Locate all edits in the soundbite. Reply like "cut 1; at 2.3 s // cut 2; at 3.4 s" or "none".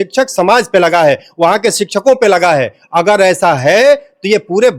none